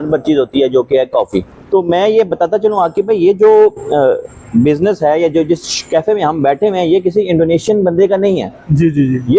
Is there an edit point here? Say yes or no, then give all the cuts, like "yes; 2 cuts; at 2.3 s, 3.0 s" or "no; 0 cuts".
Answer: yes; 1 cut; at 1.6 s